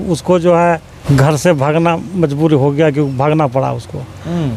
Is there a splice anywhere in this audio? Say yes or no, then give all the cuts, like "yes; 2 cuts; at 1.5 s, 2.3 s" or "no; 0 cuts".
yes; 1 cut; at 0.9 s